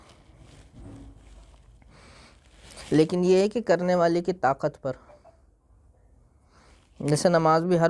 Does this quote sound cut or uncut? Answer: uncut